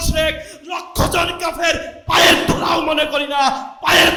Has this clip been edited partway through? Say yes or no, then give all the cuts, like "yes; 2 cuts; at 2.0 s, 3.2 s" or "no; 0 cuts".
no; 0 cuts